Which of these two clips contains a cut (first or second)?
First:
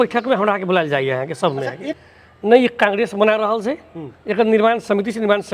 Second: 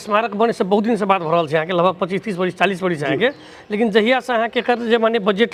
first